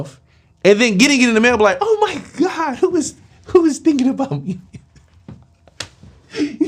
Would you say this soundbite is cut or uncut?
uncut